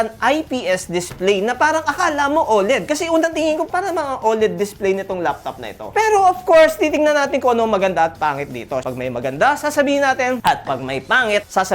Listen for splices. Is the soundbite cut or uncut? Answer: cut